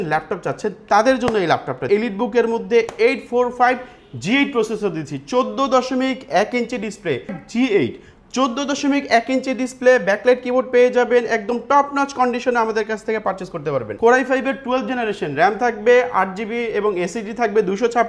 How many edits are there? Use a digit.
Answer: 3